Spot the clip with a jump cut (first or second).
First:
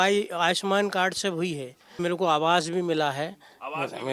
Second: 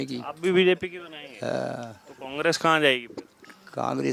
first